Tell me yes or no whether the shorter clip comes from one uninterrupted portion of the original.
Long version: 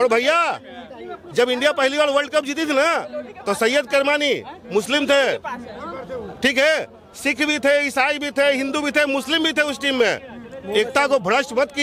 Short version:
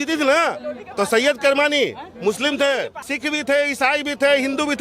no